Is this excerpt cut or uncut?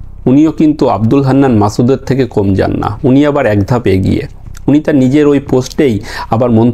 uncut